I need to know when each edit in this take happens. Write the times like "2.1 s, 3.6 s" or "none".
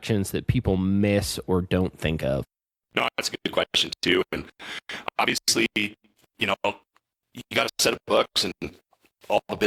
none